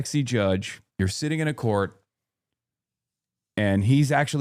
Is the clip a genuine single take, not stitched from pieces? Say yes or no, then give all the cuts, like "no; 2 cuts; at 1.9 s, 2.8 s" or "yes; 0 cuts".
yes; 0 cuts